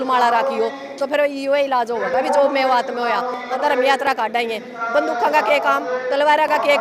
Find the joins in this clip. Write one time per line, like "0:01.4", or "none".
0:03.6